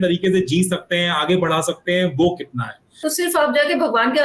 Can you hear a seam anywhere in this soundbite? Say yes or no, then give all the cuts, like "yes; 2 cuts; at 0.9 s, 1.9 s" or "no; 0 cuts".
yes; 1 cut; at 3.0 s